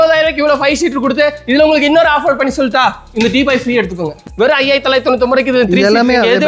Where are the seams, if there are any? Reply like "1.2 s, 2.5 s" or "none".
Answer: 4.2 s